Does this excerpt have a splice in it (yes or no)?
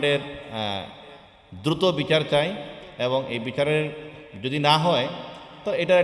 no